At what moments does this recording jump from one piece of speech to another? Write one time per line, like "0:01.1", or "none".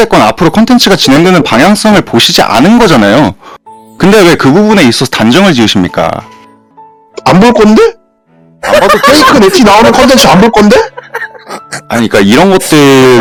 none